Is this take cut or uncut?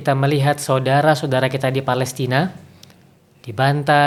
uncut